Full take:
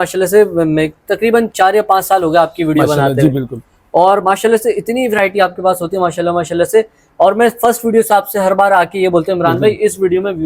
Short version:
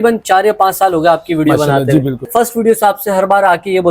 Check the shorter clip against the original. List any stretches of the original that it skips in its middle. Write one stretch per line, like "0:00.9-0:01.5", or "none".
0:03.6-0:07.6